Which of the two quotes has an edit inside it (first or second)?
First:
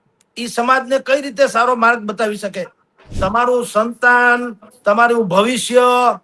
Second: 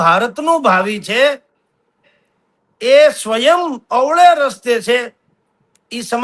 first